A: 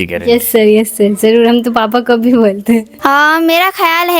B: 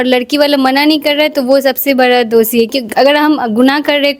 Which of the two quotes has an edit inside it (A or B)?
A